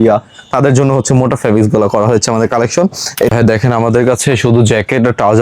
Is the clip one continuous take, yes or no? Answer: no